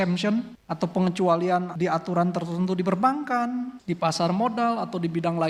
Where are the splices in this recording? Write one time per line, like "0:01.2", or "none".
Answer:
none

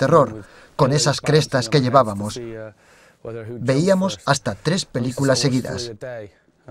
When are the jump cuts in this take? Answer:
0:05.8

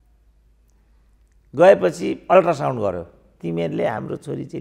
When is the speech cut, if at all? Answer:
0:03.4

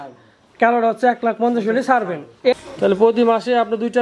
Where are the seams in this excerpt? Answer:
0:02.5

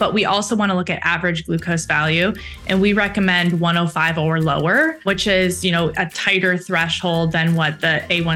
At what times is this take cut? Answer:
0:05.0

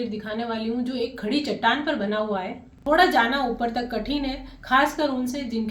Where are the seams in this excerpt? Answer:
0:02.5

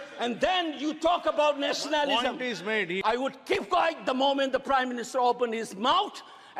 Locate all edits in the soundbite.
0:03.0

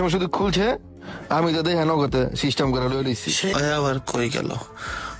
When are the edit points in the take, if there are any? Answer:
0:03.5

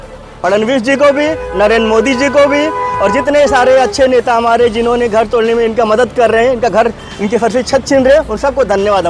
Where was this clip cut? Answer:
none

